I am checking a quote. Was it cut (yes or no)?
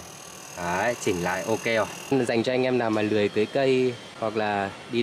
yes